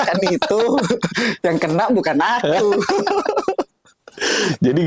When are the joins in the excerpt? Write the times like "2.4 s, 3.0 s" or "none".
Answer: none